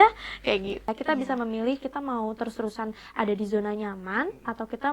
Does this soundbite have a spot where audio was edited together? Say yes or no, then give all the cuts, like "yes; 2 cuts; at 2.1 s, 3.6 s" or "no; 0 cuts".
yes; 1 cut; at 0.9 s